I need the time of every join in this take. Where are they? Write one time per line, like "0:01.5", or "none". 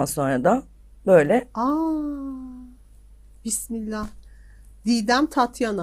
none

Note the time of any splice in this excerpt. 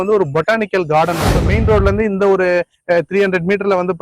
0:01.5

